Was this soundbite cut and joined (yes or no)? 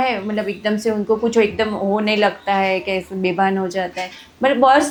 no